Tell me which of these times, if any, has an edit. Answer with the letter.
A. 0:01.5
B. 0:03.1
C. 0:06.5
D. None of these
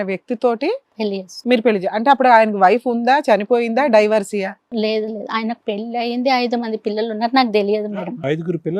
D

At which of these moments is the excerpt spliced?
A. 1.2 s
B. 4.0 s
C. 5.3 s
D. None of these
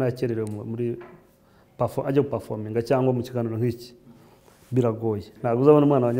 C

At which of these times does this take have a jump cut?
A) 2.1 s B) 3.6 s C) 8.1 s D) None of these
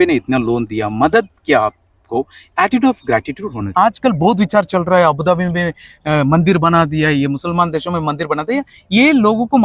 B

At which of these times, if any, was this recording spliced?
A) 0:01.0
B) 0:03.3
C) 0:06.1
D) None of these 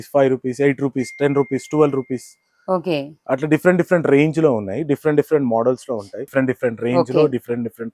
C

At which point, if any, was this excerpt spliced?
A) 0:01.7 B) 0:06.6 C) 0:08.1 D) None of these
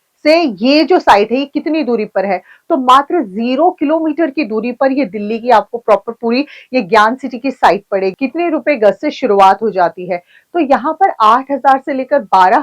C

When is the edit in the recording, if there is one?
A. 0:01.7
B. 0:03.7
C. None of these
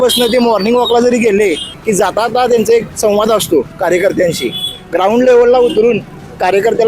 A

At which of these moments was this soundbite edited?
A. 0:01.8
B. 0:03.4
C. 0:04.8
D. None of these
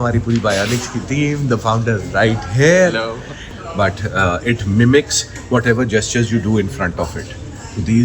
B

